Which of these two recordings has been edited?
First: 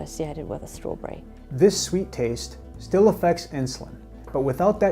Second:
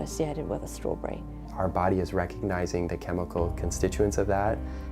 second; 1 cut; at 1.4 s

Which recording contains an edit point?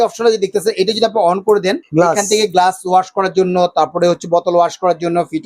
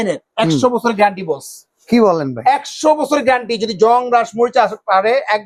first; 1 cut; at 1.8 s

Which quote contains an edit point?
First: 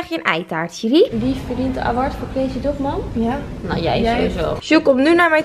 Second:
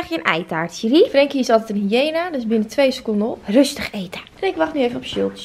first; 2 cuts; at 1.1 s, 4.6 s

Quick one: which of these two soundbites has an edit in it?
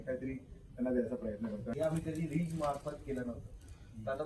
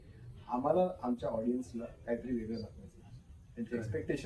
first; 1 cut; at 1.7 s

